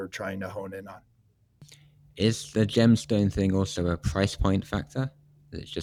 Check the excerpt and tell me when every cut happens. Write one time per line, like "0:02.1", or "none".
none